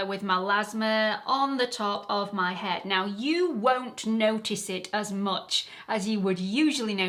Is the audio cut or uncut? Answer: uncut